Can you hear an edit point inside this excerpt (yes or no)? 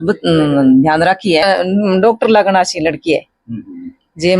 yes